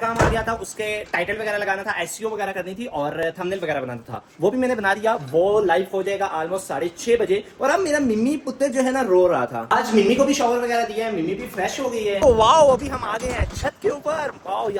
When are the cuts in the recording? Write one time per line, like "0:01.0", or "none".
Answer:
none